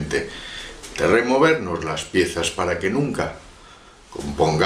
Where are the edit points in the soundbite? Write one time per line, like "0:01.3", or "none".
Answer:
0:01.5